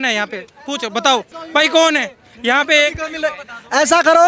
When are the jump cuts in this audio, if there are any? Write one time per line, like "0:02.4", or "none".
0:01.4